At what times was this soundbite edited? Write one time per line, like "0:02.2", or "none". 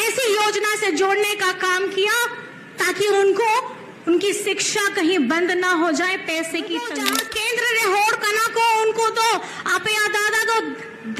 0:07.0

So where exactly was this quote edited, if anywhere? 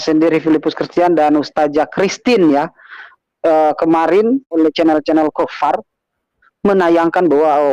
0:04.5

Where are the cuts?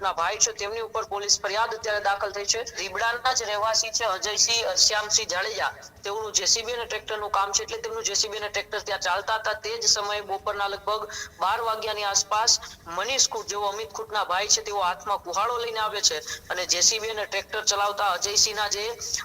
0:02.8

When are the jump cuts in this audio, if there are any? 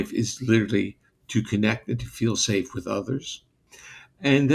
0:03.6

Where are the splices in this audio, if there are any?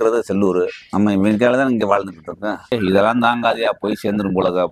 0:02.7

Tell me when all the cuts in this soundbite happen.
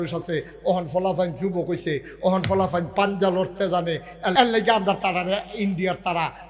0:04.3

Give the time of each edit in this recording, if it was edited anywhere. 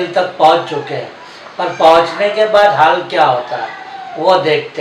none

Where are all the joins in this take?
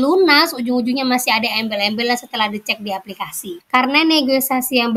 0:03.5

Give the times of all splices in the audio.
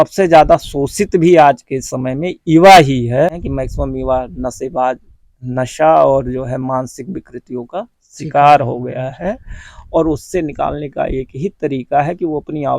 0:03.4

